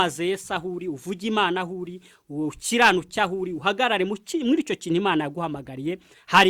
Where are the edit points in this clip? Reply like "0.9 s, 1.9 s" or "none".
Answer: none